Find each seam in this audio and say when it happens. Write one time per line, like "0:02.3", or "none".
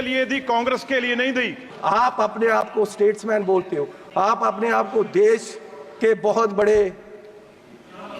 0:01.6